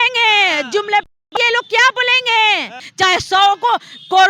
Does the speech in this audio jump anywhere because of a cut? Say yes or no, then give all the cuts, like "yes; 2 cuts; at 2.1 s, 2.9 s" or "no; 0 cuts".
yes; 1 cut; at 2.8 s